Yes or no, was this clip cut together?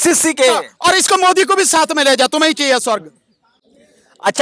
no